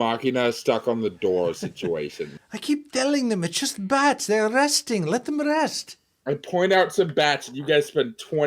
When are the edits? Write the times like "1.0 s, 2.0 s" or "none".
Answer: 2.3 s